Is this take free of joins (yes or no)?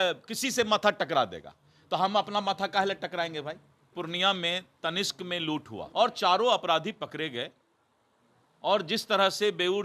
no